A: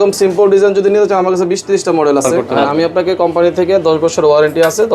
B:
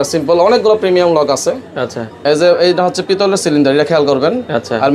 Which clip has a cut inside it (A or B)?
A